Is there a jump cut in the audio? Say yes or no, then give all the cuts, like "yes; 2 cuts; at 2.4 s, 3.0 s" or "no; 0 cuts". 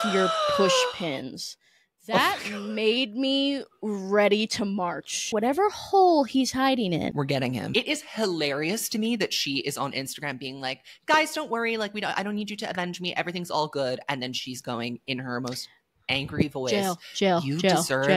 yes; 2 cuts; at 5.3 s, 7.7 s